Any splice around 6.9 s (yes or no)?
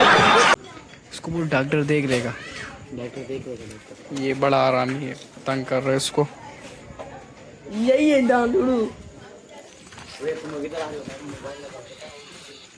no